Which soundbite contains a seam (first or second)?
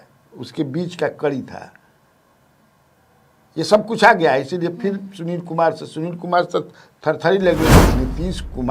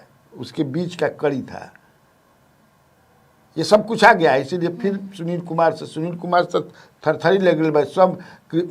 first